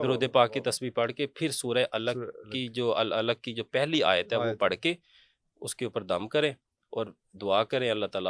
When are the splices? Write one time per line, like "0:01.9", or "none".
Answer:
none